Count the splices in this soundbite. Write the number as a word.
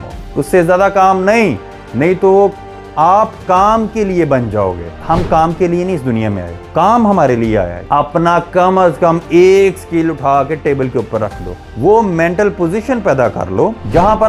four